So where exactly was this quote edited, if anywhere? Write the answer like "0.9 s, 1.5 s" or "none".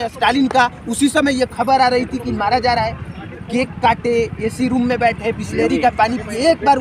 none